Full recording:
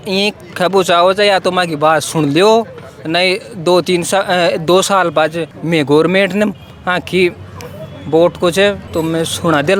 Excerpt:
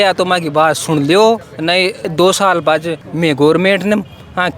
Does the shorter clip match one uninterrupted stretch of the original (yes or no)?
no